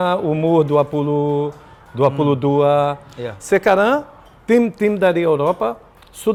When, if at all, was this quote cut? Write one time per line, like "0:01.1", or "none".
none